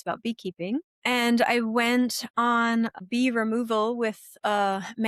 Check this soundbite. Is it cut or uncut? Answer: cut